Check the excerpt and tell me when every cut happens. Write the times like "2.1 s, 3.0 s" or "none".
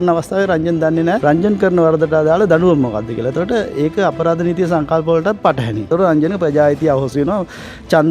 1.2 s, 5.9 s